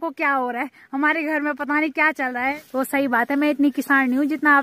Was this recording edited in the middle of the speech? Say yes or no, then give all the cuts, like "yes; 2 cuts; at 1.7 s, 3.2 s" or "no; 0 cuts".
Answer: yes; 1 cut; at 2.6 s